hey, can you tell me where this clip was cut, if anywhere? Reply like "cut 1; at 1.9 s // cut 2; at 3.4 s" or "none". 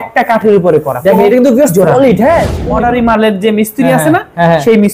cut 1; at 2.6 s